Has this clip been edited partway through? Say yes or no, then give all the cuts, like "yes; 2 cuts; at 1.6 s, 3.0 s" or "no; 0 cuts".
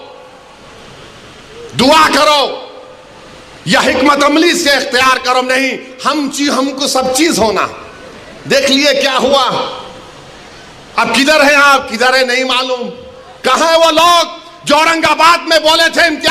no; 0 cuts